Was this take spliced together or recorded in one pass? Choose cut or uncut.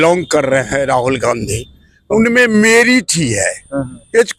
uncut